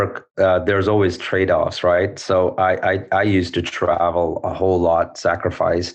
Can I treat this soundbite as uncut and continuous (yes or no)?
yes